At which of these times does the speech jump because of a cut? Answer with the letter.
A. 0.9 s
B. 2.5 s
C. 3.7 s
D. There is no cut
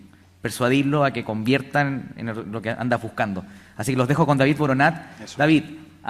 A